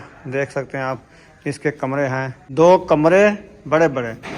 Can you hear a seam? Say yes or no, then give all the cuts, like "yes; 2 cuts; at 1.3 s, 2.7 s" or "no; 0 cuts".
yes; 1 cut; at 2.4 s